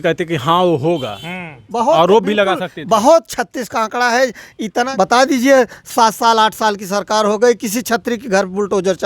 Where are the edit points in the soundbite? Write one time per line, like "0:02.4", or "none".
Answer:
0:04.9